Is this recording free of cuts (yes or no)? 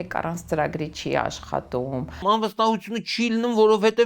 no